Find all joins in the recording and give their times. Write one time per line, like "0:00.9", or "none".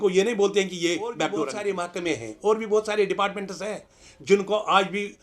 0:01.5